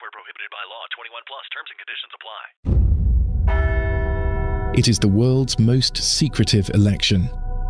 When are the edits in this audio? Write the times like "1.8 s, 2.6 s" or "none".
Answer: 2.5 s